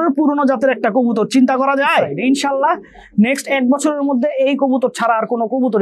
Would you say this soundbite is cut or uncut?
cut